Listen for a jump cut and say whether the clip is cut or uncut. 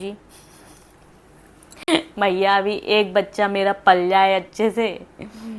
uncut